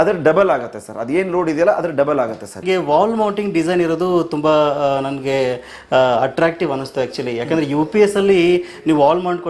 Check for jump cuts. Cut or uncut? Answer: cut